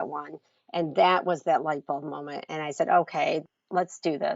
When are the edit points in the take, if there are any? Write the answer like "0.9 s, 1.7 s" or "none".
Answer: 3.4 s